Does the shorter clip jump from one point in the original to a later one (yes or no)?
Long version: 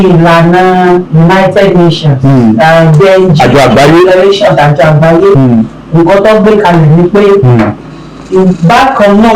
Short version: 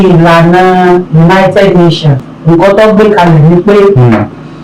yes